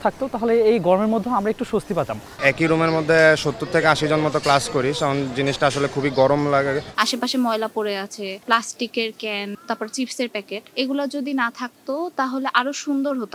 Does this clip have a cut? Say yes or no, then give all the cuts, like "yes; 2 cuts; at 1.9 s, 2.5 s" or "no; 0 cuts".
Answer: yes; 5 cuts; at 2.4 s, 6.9 s, 8.4 s, 9.6 s, 10.6 s